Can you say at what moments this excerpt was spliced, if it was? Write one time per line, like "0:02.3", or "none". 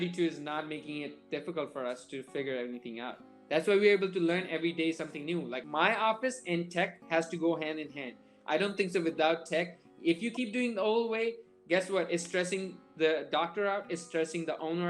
0:05.6